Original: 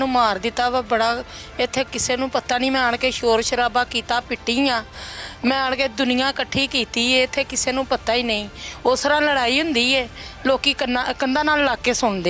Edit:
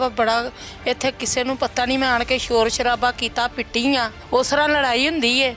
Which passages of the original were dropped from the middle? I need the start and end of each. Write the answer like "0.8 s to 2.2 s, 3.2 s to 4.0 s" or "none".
4.9 s to 8.7 s